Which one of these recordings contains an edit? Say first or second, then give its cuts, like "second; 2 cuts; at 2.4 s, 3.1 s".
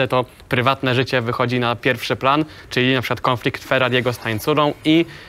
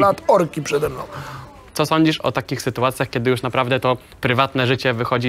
second; 1 cut; at 1.6 s